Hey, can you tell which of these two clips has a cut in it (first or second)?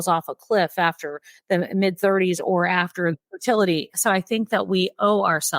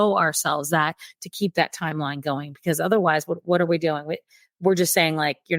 first